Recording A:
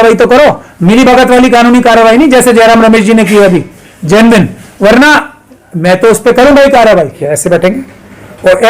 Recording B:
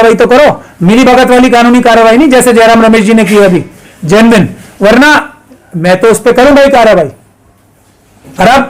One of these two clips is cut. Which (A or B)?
A